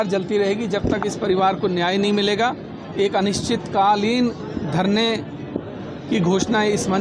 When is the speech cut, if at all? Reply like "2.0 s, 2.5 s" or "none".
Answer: none

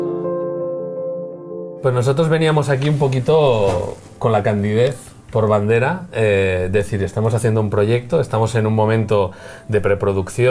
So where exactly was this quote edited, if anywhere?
5.6 s

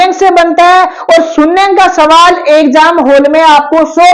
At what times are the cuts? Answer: none

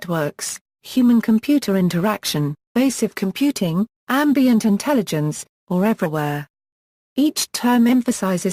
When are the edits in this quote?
none

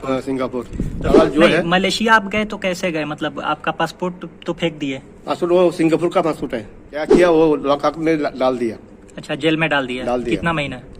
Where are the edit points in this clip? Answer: 1.1 s, 7.1 s

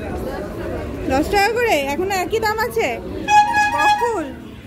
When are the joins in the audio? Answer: none

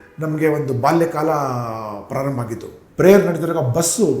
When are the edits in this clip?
2.8 s

